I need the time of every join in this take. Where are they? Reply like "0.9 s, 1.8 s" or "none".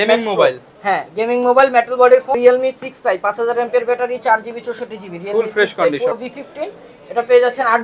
2.4 s, 6.1 s